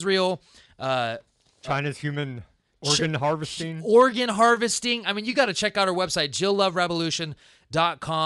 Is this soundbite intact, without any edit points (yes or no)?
yes